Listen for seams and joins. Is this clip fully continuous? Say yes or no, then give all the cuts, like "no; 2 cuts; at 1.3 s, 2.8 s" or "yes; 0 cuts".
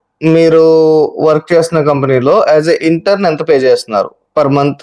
yes; 0 cuts